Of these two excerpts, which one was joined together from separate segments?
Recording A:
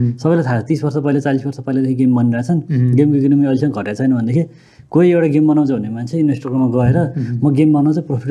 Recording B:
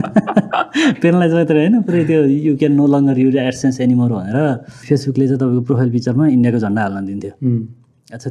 B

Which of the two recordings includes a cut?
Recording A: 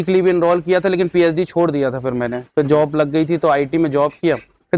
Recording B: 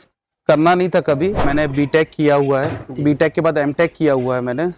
B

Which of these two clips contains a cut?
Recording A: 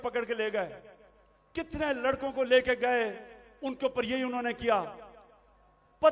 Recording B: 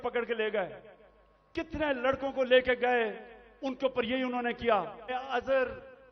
B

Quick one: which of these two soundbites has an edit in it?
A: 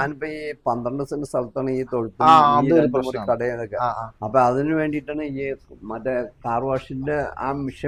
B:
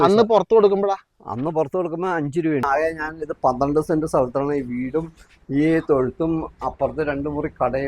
B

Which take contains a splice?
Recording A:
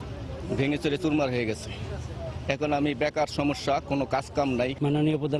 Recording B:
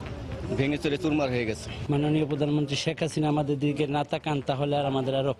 B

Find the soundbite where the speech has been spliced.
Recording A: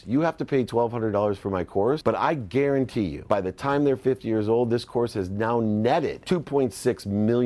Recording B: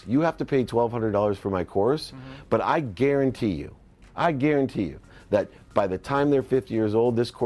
A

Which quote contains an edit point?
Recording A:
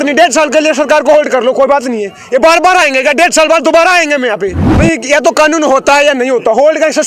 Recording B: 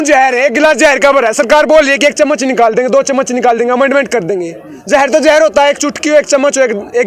A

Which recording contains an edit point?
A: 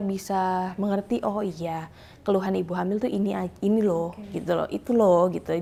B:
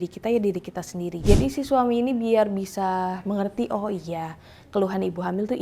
B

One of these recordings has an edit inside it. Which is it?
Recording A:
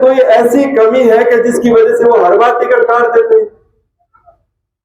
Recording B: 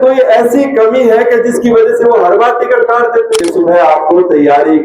B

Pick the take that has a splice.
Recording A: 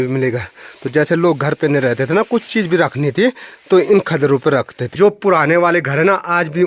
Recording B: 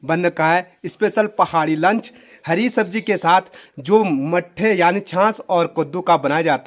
A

